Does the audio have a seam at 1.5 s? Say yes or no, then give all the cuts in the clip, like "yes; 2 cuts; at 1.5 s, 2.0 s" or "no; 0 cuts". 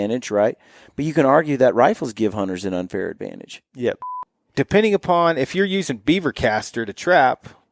no; 1 cut; at 4.1 s